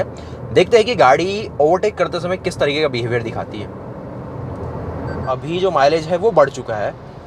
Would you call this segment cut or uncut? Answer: cut